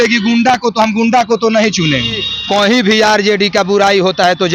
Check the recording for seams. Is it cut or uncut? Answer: cut